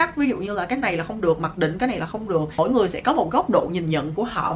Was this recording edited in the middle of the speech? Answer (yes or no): no